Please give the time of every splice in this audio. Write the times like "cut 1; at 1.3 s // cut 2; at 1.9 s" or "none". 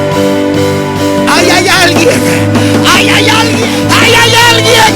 cut 1; at 3.6 s